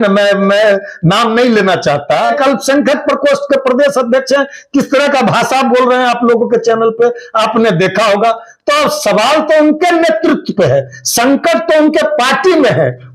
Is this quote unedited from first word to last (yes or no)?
no